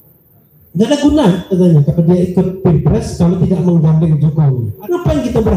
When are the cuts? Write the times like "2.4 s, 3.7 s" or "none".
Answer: 4.7 s